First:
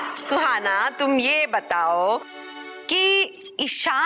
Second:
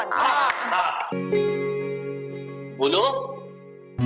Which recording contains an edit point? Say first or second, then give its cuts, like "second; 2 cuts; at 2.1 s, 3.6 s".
second; 1 cut; at 1.2 s